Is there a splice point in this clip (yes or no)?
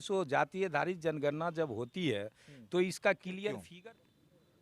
yes